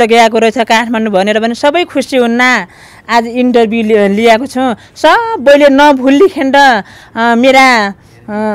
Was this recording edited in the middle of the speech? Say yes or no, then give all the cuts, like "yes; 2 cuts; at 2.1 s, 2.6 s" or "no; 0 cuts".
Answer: no; 0 cuts